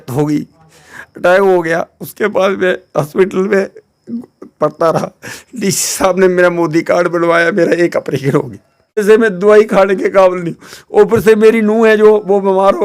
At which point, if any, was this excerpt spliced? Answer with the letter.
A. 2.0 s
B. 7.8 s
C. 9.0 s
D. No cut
C